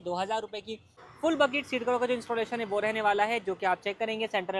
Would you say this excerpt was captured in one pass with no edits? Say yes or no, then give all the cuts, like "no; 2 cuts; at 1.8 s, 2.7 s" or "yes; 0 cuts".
no; 1 cut; at 0.9 s